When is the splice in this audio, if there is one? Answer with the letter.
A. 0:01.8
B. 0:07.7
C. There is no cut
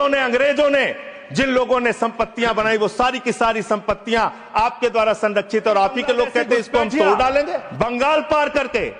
B